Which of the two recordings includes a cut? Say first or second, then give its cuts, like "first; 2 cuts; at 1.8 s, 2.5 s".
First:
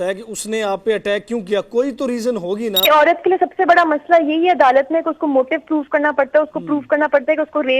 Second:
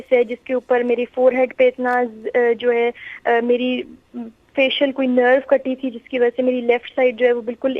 first; 1 cut; at 2.9 s